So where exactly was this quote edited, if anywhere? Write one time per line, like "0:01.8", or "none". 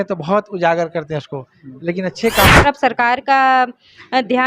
0:02.6